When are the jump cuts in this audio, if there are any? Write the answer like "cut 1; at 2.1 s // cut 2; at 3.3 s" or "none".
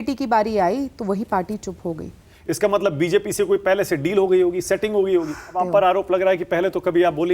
cut 1; at 2.3 s // cut 2; at 5.5 s